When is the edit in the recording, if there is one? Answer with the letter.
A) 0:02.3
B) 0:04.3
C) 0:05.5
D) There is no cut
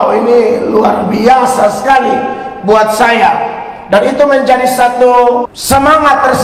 C